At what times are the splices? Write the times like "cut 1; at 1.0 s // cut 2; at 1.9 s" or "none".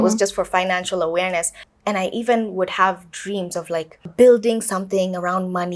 cut 1; at 1.6 s // cut 2; at 4.1 s

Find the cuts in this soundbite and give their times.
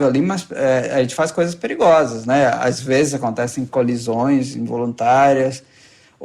cut 1; at 3.7 s

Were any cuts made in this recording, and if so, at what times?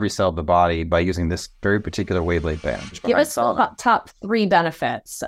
cut 1; at 2.7 s

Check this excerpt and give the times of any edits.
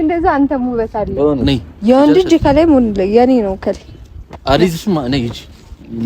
cut 1; at 1.4 s

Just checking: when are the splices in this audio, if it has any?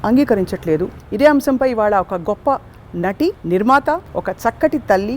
cut 1; at 1.0 s // cut 2; at 3.4 s // cut 3; at 4.1 s

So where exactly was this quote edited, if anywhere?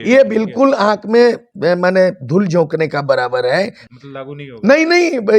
cut 1; at 3.8 s

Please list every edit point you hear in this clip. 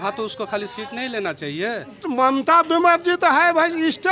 cut 1; at 2.0 s

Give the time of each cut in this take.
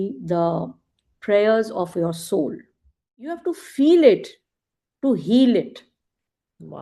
cut 1; at 3.5 s

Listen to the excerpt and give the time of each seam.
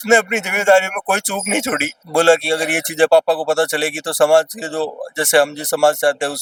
none

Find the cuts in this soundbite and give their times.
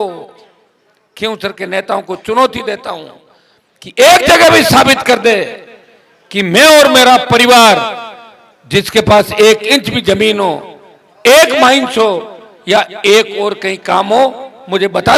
none

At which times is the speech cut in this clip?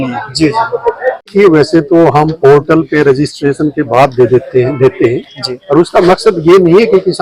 cut 1; at 1.3 s

